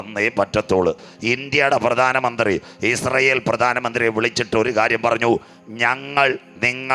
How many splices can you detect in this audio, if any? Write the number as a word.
one